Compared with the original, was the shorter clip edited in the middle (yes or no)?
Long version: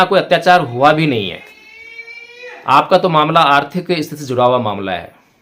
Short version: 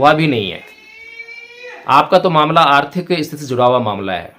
no